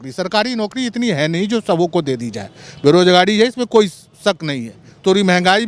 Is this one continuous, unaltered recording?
yes; 0 cuts

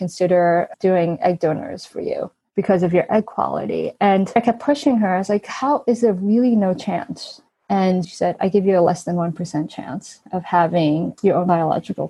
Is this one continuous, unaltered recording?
no; 3 cuts; at 2.4 s, 4.4 s, 8.1 s

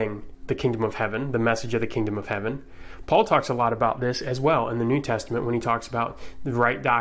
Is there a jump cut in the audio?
no; 0 cuts

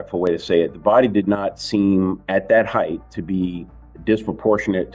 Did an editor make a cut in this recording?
no; 0 cuts

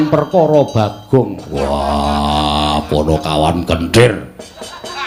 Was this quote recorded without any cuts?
yes; 0 cuts

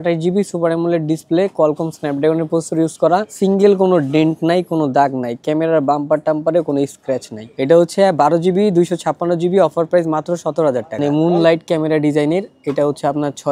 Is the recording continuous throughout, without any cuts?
no; 3 cuts; at 3.3 s, 7.4 s, 10.9 s

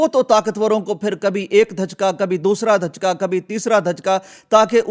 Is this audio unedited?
yes; 0 cuts

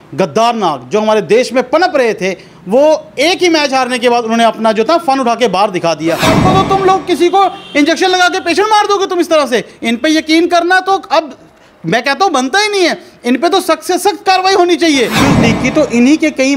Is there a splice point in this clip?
yes; 2 cuts; at 6.3 s, 15.2 s

